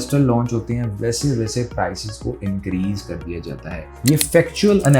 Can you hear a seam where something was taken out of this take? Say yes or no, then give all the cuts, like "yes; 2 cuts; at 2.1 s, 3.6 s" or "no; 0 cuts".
yes; 1 cut; at 3.8 s